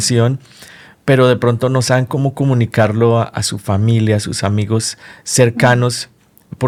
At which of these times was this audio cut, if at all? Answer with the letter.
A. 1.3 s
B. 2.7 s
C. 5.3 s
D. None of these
D